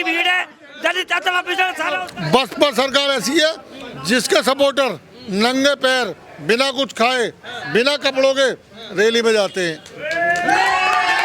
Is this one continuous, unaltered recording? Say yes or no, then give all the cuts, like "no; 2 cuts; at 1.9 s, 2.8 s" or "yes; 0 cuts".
no; 1 cut; at 2.0 s